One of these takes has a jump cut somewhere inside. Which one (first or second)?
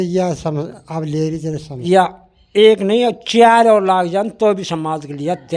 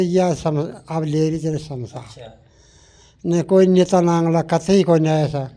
first